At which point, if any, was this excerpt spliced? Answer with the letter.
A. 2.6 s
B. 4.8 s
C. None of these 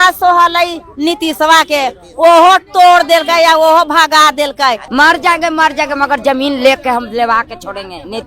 B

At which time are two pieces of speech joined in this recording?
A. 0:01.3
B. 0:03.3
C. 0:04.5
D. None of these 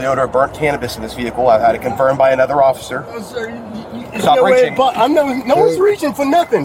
D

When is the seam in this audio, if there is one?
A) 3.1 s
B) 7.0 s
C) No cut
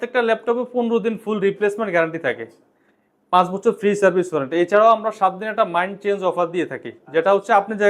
C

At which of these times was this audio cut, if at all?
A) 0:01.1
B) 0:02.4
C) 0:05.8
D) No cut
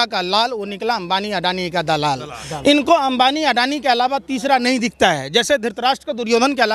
D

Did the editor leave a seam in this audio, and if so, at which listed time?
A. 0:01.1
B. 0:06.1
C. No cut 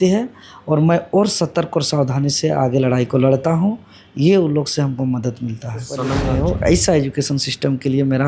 B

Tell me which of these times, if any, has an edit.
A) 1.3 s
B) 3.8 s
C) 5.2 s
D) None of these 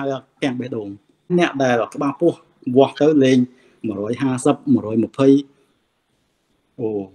A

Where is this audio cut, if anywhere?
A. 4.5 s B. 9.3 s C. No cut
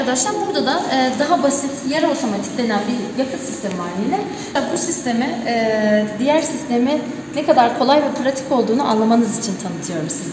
A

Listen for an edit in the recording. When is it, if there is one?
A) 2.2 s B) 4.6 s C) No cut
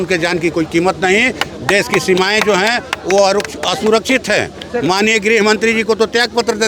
C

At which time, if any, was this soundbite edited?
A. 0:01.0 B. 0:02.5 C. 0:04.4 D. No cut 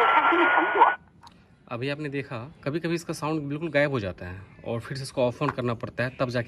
B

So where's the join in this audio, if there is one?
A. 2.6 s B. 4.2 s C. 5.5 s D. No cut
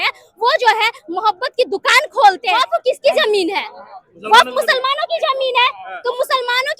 A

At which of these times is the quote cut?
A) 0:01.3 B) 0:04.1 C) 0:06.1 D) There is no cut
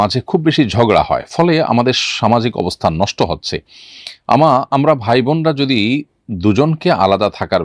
D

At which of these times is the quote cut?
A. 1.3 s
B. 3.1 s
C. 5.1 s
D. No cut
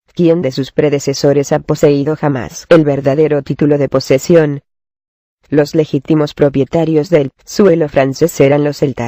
B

